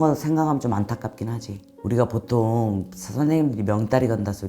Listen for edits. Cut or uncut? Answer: cut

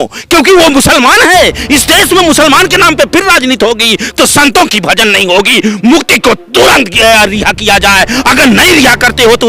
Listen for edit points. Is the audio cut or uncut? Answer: uncut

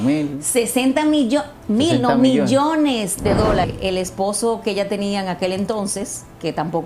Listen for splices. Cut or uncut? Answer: cut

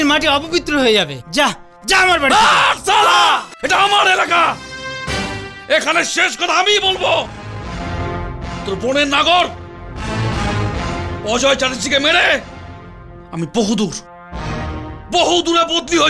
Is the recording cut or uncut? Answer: cut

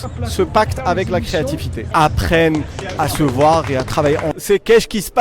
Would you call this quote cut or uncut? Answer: cut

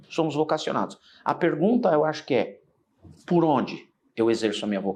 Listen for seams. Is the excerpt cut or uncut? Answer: uncut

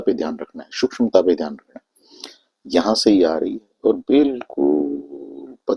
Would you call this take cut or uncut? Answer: uncut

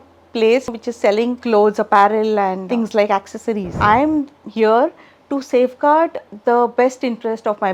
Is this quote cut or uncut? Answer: cut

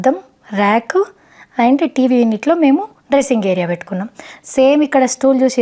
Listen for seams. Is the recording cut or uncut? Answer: uncut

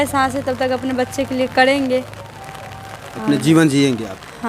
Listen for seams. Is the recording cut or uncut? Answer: uncut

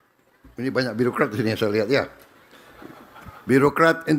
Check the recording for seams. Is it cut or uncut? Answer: uncut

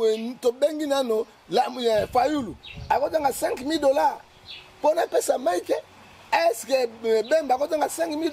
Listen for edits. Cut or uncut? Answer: uncut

